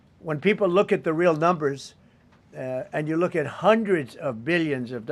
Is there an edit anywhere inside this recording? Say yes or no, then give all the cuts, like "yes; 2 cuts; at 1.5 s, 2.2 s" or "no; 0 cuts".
no; 0 cuts